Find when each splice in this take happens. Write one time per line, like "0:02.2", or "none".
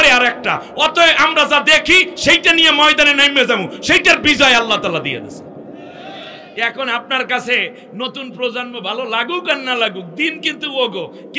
none